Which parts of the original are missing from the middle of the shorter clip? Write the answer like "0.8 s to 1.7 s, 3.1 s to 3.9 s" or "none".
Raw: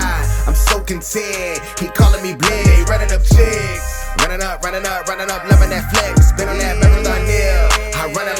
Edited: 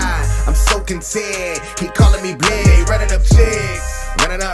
none